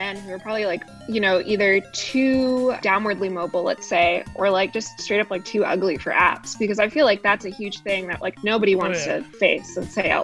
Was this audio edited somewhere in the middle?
yes; 2 cuts; at 0.9 s, 2.8 s

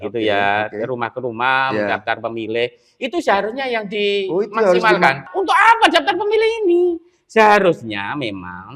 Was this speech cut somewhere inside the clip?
yes; 1 cut; at 5.3 s

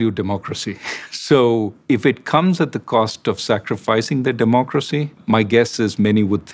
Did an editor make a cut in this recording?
yes; 2 cuts; at 1.7 s, 5.2 s

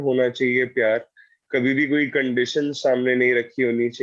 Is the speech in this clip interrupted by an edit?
no; 0 cuts

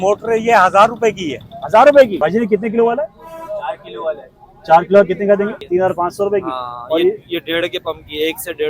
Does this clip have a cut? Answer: yes; 2 cuts; at 2.1 s, 5.6 s

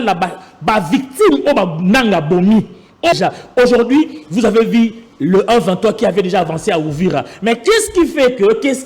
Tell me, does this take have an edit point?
yes; 1 cut; at 3.1 s

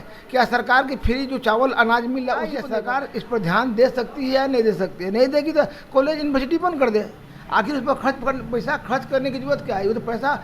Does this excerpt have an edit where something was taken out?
yes; 1 cut; at 2.6 s

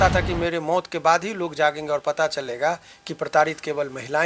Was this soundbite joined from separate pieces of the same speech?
no; 0 cuts

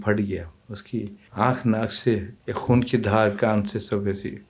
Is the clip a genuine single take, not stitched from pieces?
no; 2 cuts; at 1.2 s, 2.4 s

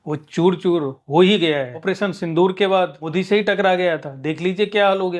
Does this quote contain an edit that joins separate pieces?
yes; 2 cuts; at 1.7 s, 3.0 s

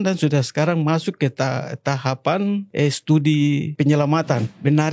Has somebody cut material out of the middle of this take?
yes; 2 cuts; at 2.7 s, 4.0 s

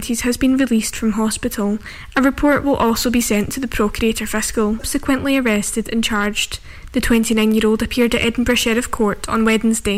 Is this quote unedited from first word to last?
no; 1 cut; at 4.9 s

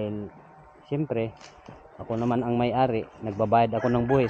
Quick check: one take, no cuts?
yes; 0 cuts

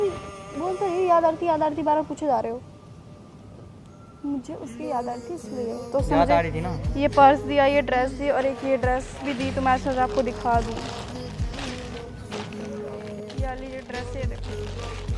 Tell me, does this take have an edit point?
no; 0 cuts

